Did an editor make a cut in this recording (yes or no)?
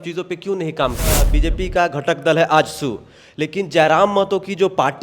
yes